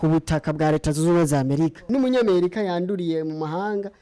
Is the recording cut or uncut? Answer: cut